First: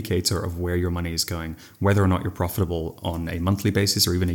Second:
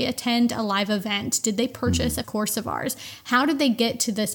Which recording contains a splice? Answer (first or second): second